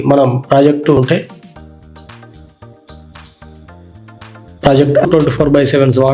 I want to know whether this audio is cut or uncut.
cut